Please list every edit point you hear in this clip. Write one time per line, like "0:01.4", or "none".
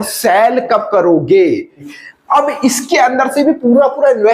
0:01.9